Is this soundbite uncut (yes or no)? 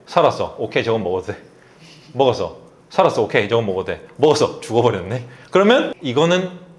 yes